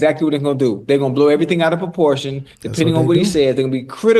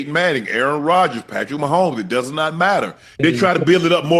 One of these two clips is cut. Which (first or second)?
second